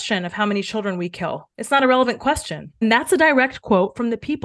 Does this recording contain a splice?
no; 0 cuts

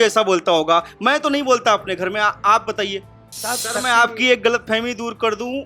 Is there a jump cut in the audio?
yes; 1 cut; at 3.6 s

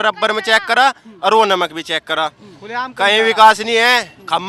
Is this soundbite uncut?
yes; 0 cuts

